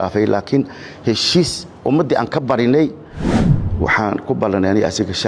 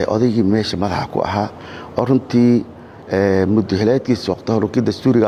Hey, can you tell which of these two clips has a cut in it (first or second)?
first